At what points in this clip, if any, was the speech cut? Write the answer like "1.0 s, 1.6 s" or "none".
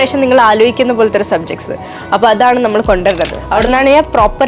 3.4 s